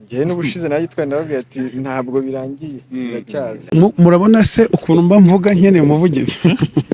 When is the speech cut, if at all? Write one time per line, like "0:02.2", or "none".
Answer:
0:03.6